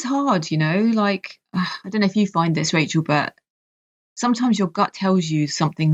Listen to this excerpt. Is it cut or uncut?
uncut